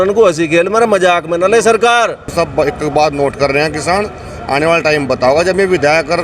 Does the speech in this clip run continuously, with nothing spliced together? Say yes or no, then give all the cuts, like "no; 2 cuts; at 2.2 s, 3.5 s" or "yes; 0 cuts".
no; 1 cut; at 2.3 s